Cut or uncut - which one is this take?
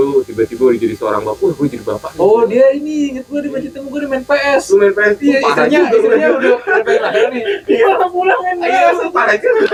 uncut